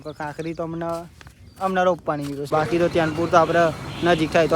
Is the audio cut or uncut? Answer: cut